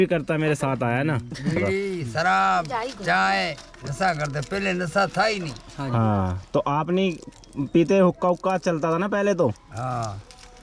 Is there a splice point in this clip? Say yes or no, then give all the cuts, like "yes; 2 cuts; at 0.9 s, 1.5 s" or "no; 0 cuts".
yes; 1 cut; at 1.6 s